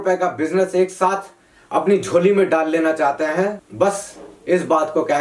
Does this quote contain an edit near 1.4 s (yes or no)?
no